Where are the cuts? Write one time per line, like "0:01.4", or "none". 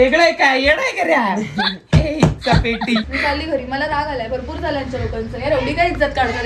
0:03.0